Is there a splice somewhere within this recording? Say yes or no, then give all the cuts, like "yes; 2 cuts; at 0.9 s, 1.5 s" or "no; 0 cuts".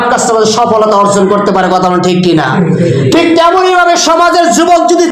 no; 0 cuts